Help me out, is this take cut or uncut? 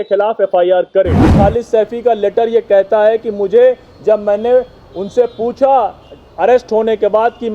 cut